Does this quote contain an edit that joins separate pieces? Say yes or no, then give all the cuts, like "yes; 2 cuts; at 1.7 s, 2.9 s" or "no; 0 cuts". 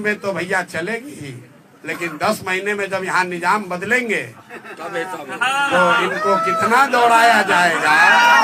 no; 0 cuts